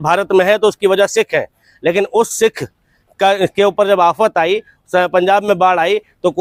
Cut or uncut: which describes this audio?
uncut